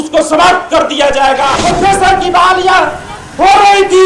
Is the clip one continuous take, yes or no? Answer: no